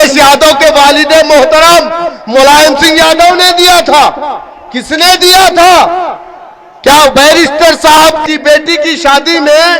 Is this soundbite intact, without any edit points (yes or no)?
no